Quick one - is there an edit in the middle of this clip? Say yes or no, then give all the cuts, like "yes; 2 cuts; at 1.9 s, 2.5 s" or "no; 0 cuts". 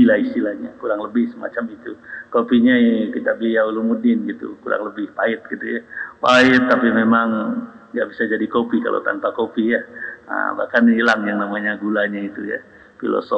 no; 0 cuts